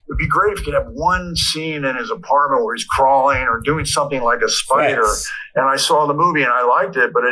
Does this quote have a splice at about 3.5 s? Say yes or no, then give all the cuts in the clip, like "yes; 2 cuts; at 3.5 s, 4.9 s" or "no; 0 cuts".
yes; 1 cut; at 3.5 s